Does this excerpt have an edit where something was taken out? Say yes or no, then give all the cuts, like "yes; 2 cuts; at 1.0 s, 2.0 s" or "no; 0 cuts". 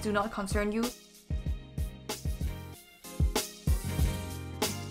no; 0 cuts